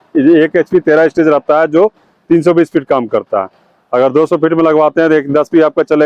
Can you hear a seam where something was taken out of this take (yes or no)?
no